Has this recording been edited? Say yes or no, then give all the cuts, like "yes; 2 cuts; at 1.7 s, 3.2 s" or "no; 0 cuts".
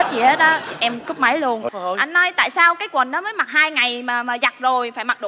yes; 1 cut; at 1.7 s